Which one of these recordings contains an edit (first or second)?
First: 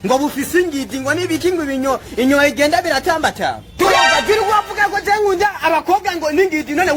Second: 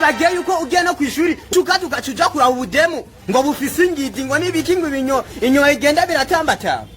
second